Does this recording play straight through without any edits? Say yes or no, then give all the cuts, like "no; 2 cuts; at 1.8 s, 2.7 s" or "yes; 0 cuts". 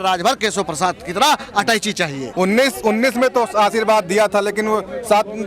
yes; 0 cuts